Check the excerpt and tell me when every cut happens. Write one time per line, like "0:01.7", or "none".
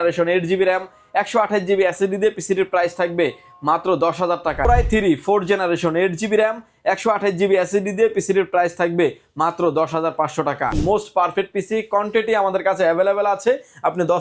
0:04.7
0:10.8